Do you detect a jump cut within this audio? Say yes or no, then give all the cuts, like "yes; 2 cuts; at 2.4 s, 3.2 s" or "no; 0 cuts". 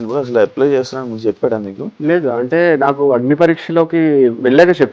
yes; 1 cut; at 1.9 s